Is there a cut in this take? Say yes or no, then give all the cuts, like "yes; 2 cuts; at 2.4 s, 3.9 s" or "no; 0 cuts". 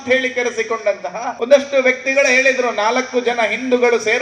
yes; 1 cut; at 1.3 s